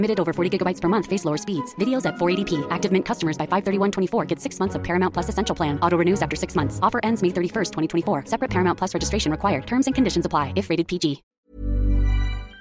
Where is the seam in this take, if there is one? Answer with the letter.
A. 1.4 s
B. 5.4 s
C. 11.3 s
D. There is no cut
C